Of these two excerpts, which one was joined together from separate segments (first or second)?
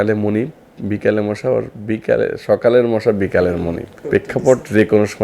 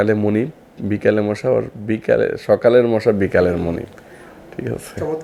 first